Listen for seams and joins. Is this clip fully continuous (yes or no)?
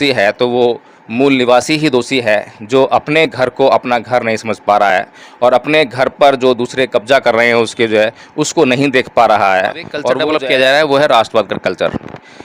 no